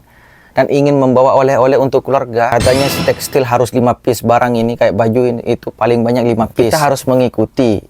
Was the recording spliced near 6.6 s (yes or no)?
yes